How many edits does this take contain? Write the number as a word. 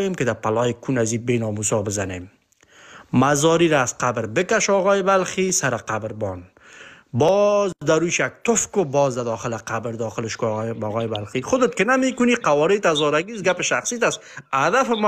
zero